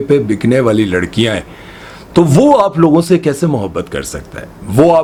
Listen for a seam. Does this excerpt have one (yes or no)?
no